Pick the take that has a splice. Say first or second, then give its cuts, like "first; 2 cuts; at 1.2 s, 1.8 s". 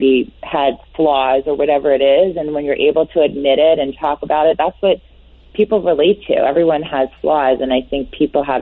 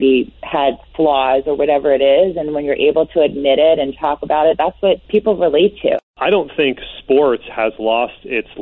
second; 2 cuts; at 5.0 s, 6.0 s